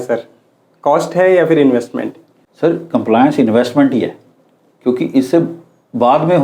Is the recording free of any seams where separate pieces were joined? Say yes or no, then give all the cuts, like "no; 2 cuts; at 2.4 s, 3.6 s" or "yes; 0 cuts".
yes; 0 cuts